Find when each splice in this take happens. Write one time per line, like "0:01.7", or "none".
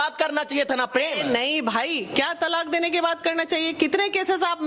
none